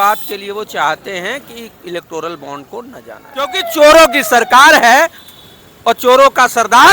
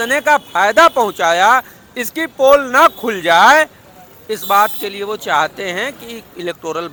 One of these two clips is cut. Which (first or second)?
first